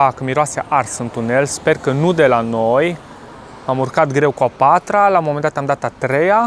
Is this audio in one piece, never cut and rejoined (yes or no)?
yes